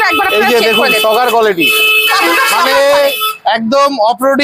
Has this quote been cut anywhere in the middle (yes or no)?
no